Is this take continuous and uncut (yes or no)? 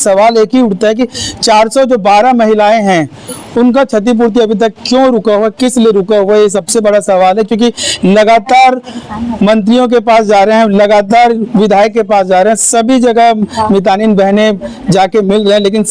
yes